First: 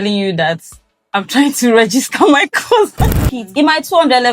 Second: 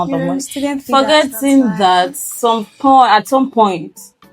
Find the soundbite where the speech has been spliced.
first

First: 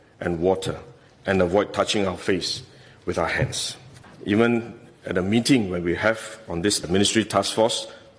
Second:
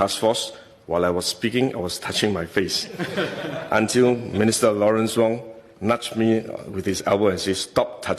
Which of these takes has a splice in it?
first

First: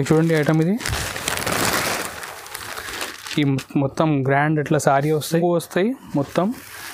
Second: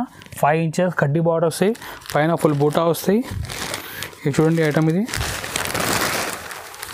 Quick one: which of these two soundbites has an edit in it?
first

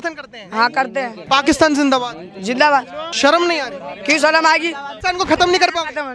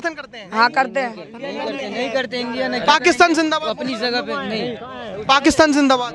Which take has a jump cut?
first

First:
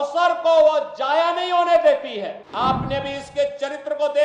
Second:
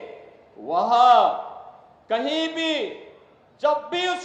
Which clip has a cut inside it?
first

